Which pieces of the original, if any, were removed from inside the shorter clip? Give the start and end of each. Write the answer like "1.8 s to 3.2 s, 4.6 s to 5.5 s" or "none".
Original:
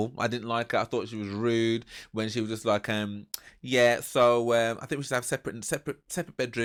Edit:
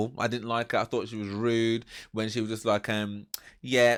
none